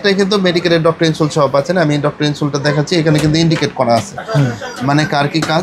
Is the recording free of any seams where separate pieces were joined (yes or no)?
yes